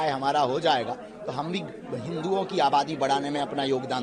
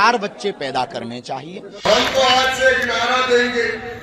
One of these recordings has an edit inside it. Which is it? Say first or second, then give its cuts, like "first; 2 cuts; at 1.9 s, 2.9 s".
second; 1 cut; at 1.9 s